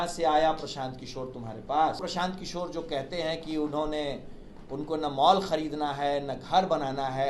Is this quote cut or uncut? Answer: cut